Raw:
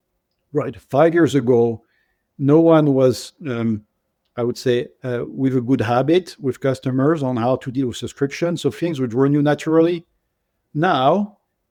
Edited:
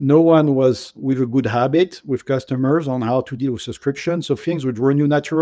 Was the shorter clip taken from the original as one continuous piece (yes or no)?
no